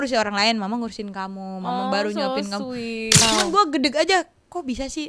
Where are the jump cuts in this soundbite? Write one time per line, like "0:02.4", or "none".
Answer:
0:03.2

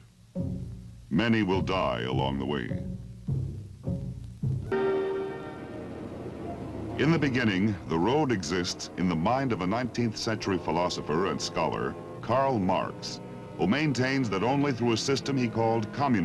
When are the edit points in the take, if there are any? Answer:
0:01.8

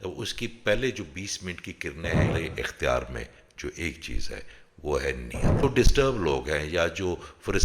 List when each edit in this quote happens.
0:02.3
0:05.6

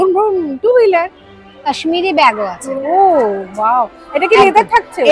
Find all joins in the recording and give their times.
0:01.7

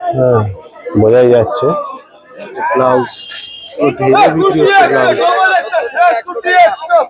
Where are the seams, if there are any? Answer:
0:02.5

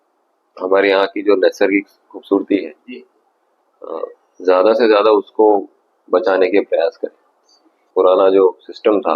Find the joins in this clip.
0:07.7

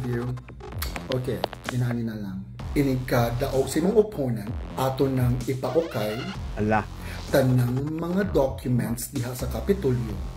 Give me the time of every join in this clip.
none

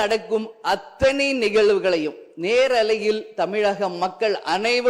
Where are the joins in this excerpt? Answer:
none

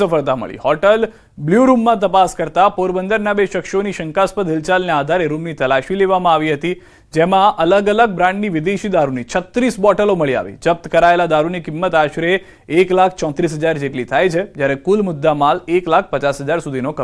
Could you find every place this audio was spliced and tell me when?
0:03.4

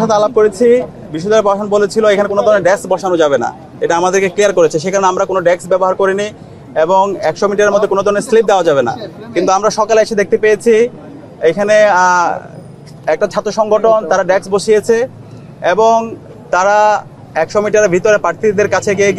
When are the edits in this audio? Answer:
none

